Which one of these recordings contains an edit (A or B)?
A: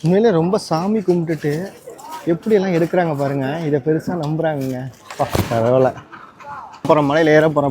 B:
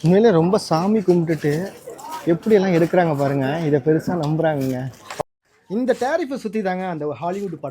B